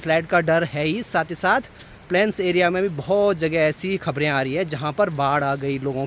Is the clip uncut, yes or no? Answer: yes